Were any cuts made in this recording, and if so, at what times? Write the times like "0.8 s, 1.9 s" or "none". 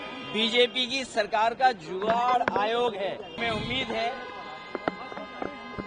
3.4 s